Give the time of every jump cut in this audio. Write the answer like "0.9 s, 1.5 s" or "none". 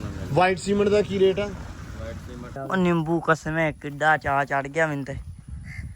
2.6 s